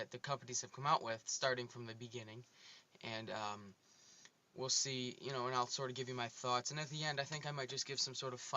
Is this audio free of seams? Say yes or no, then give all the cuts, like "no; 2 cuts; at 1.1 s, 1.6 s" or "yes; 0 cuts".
no; 1 cut; at 4.1 s